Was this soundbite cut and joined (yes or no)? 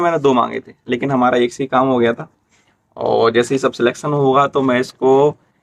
no